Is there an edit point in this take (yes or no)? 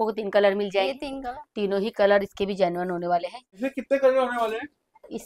yes